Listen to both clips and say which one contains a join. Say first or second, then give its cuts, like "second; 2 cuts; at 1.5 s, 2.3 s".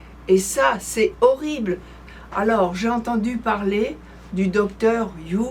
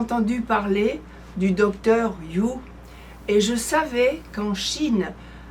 first; 1 cut; at 2.0 s